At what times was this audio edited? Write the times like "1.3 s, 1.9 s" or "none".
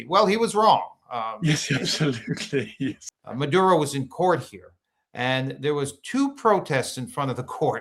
3.0 s